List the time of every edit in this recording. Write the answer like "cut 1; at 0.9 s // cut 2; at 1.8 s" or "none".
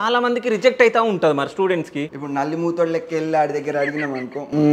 cut 1; at 2.0 s